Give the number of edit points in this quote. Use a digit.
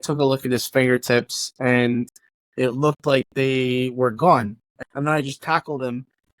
1